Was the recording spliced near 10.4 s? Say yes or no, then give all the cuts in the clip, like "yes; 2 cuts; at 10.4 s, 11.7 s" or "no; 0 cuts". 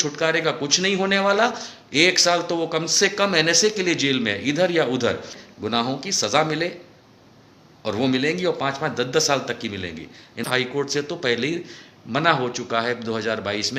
yes; 2 cuts; at 5.4 s, 10.4 s